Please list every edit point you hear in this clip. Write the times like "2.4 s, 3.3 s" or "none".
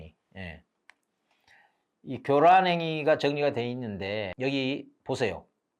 4.3 s